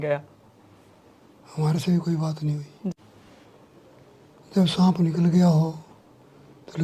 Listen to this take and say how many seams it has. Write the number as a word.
one